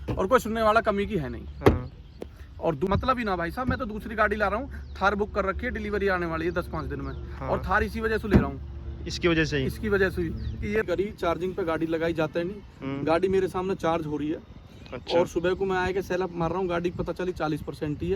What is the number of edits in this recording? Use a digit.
2